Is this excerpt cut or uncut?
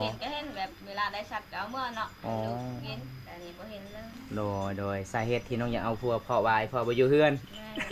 uncut